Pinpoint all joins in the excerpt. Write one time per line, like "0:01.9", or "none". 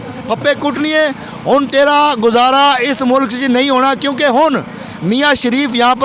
none